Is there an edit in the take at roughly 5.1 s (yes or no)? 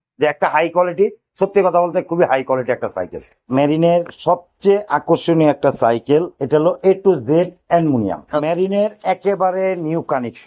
no